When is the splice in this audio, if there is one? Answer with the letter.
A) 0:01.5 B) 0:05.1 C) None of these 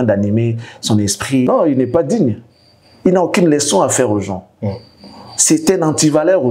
A